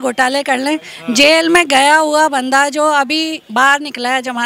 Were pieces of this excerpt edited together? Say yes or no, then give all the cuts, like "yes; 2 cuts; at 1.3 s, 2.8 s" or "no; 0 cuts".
no; 0 cuts